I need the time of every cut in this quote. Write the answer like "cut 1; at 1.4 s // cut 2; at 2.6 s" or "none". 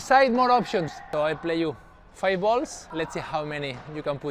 cut 1; at 1.0 s // cut 2; at 2.8 s

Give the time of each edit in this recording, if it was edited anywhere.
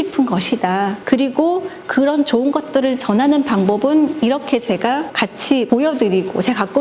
cut 1; at 1.0 s // cut 2; at 5.6 s

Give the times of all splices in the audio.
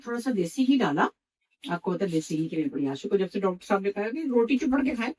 none

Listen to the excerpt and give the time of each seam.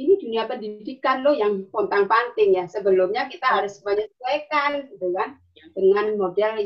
none

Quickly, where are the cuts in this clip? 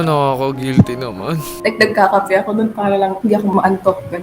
cut 1; at 1.4 s

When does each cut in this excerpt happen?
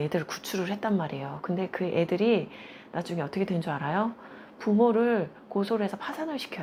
none

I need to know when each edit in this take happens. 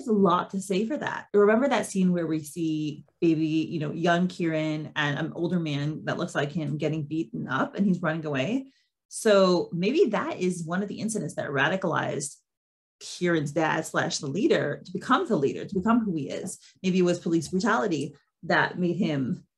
cut 1; at 1.1 s

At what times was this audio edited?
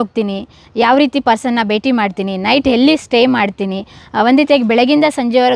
none

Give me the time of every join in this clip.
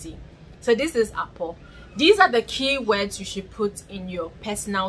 none

